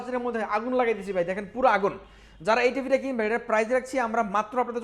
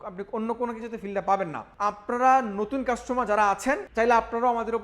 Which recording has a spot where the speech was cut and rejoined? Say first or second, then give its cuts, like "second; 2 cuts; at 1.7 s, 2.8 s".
second; 2 cuts; at 1.6 s, 3.9 s